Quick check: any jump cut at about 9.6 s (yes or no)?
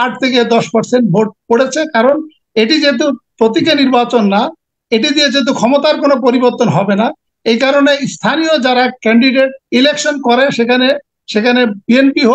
yes